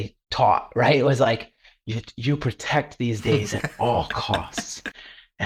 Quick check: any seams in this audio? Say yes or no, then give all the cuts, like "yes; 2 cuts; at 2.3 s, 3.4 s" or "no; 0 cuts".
no; 0 cuts